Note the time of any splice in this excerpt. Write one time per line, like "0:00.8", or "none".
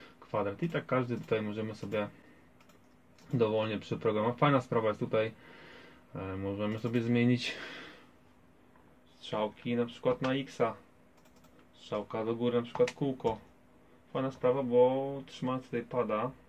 none